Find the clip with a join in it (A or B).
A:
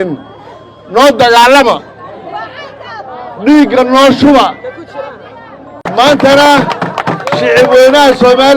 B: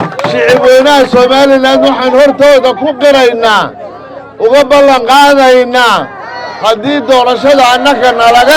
A